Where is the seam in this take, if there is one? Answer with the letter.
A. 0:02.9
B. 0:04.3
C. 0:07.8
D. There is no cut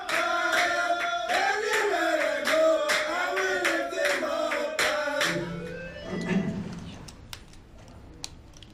B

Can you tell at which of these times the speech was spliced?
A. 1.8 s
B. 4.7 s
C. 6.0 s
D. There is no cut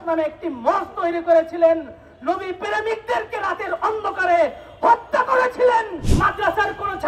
C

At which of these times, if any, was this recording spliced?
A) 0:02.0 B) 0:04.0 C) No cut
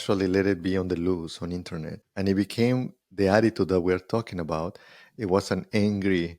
A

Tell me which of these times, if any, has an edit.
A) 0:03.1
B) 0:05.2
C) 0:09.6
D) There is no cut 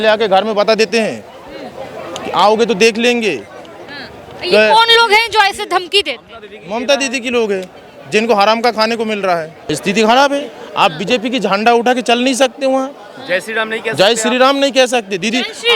C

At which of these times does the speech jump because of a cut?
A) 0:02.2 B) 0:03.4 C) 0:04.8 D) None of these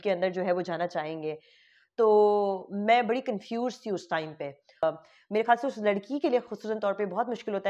C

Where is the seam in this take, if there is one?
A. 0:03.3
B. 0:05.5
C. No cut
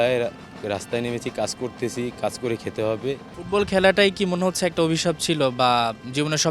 A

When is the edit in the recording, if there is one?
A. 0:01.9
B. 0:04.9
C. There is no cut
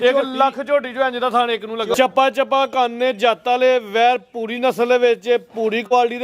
A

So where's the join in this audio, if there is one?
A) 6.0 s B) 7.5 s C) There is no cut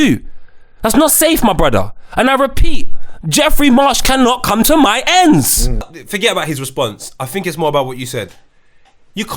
A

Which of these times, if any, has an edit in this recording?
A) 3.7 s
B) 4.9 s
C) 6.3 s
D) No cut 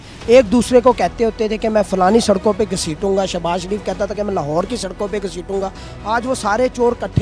D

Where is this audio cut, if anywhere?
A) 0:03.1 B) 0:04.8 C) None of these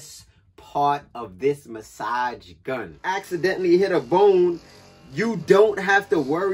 A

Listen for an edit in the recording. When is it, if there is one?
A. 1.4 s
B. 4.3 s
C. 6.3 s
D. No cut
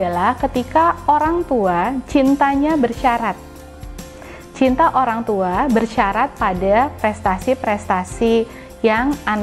D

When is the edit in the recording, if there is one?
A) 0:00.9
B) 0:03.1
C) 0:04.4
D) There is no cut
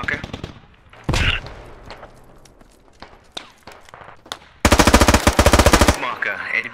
A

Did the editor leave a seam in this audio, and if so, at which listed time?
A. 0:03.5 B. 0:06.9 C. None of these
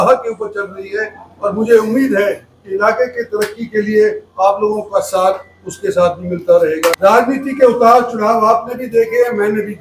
B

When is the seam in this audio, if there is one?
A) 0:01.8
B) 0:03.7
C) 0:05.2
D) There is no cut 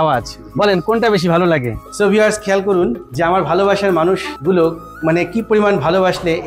A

